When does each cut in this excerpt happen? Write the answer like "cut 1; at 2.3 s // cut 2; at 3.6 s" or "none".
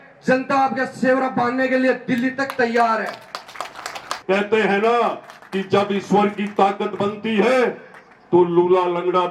cut 1; at 4.1 s